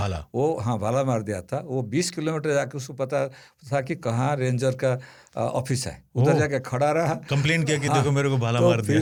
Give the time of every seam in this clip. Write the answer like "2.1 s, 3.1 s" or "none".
none